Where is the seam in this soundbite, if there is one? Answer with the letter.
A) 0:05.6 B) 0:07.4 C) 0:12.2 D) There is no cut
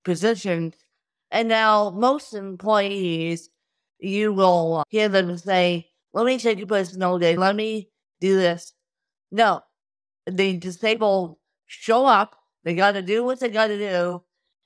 B